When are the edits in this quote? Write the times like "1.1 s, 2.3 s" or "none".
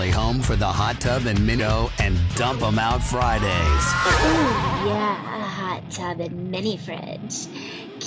1.6 s